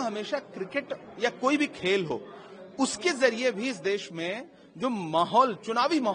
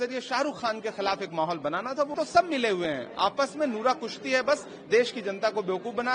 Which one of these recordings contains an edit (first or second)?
second